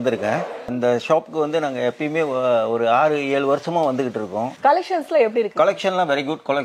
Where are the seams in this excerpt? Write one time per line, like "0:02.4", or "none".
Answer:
0:04.5

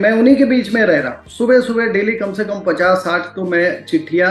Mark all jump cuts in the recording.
0:01.3

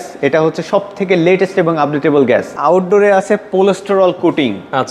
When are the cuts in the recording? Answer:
0:02.5

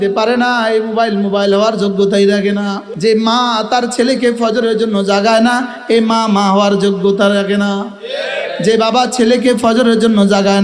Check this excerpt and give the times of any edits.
0:02.8

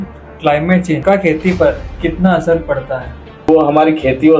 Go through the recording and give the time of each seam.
0:01.0
0:03.5

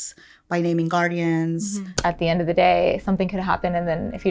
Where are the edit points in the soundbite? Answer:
0:01.8

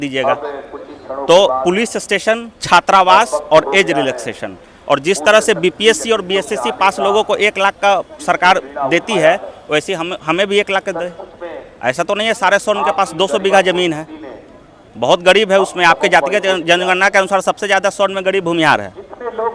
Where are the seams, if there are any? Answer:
none

